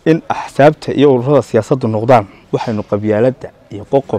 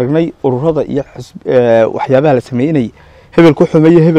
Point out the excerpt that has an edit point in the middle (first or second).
first